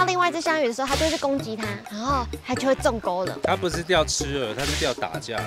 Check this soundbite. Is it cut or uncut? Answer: cut